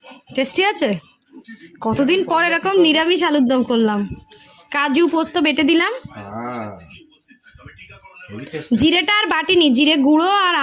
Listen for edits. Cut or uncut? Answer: uncut